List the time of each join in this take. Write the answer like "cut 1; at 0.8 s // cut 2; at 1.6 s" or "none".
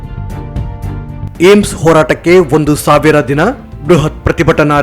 cut 1; at 1.2 s

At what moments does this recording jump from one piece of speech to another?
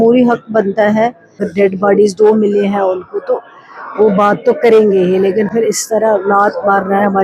cut 1; at 1.4 s

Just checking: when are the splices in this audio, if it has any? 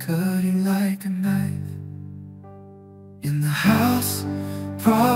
none

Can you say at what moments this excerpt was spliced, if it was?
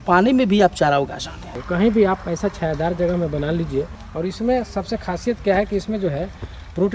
cut 1; at 1.5 s // cut 2; at 4.0 s

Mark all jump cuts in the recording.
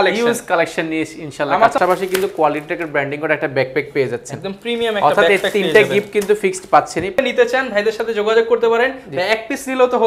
cut 1; at 1.8 s // cut 2; at 7.2 s

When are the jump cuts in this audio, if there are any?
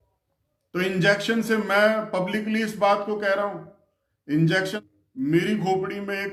cut 1; at 4.7 s

